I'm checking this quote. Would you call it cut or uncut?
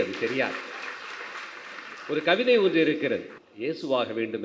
cut